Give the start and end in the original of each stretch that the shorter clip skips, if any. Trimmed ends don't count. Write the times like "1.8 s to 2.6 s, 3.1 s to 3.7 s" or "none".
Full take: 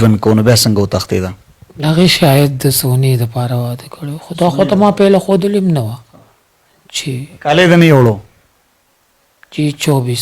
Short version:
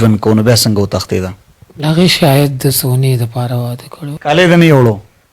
4.2 s to 7.4 s